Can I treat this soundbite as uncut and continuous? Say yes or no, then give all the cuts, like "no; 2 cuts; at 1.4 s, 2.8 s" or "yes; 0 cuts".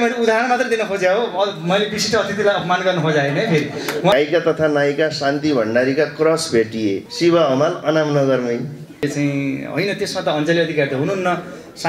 no; 3 cuts; at 4.1 s, 7.1 s, 9.0 s